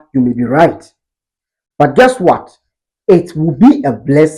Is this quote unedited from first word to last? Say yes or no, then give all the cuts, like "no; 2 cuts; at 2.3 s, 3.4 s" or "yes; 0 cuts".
yes; 0 cuts